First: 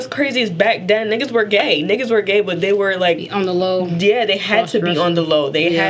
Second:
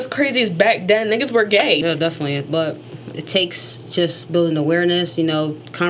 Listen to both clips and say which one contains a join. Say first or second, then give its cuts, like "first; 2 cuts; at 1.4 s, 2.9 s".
second; 1 cut; at 1.8 s